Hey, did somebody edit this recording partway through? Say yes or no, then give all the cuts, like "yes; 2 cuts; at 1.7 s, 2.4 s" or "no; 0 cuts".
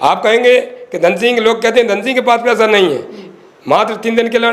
no; 0 cuts